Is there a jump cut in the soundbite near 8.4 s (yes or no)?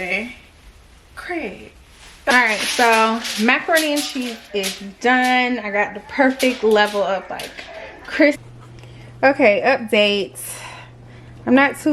yes